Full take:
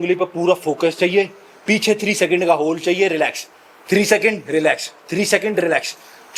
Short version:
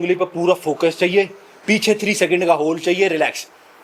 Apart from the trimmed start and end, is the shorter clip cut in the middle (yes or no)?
no